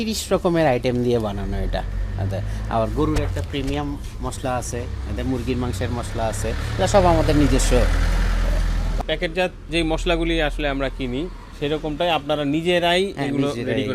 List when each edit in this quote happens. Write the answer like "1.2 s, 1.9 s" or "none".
none